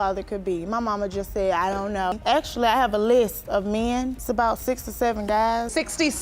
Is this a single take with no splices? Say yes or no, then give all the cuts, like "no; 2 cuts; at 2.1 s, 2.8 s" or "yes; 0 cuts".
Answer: no; 1 cut; at 2.1 s